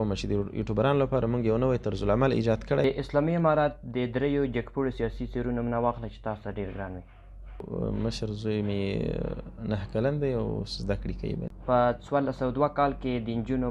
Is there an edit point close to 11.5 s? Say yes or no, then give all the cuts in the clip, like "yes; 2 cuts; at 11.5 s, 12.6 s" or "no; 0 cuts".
yes; 3 cuts; at 2.8 s, 7.7 s, 11.5 s